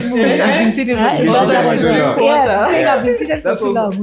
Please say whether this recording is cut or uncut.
uncut